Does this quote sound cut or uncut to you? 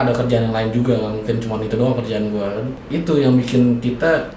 cut